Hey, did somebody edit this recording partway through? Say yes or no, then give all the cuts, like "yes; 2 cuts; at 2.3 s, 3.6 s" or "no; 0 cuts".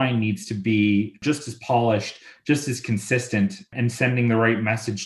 yes; 2 cuts; at 1.1 s, 3.7 s